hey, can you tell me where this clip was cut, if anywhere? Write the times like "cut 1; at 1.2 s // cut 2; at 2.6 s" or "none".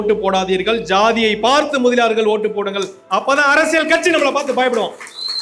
none